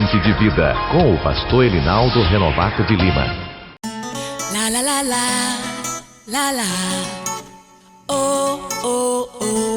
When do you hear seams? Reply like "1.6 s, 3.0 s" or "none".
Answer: 3.6 s